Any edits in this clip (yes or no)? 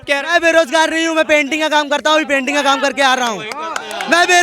no